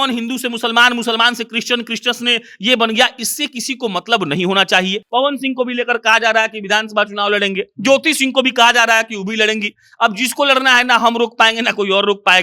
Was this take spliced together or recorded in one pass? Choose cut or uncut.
cut